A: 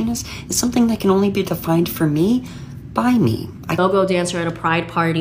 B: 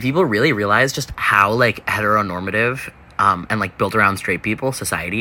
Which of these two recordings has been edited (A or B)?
A